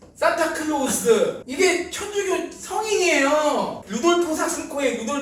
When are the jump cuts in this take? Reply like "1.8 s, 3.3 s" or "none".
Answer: 1.4 s, 3.8 s